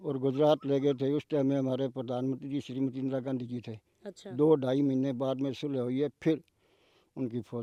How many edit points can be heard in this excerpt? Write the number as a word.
zero